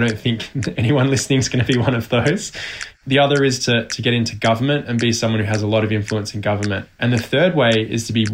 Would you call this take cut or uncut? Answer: cut